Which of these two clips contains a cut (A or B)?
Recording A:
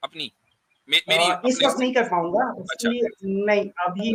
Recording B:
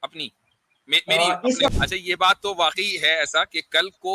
B